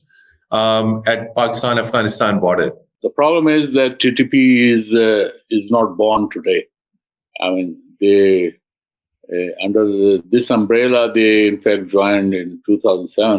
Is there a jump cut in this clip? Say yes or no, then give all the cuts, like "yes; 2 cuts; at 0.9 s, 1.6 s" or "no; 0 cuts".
yes; 1 cut; at 2.9 s